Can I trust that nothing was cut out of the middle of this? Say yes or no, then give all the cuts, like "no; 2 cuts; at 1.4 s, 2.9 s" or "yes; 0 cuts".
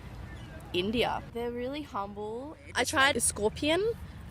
no; 2 cuts; at 1.3 s, 2.7 s